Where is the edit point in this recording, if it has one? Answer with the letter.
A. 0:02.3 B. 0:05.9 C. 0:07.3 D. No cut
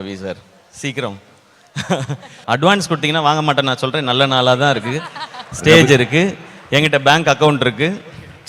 A